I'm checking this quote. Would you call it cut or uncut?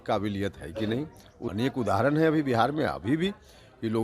cut